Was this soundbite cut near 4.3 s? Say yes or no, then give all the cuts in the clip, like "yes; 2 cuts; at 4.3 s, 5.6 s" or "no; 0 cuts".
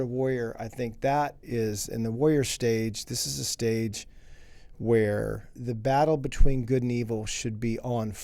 no; 2 cuts; at 1.4 s, 5.5 s